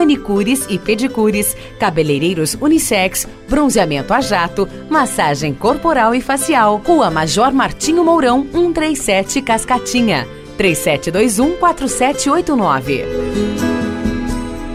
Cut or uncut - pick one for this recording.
uncut